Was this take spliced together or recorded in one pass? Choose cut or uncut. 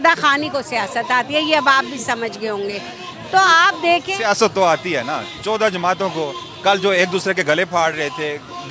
uncut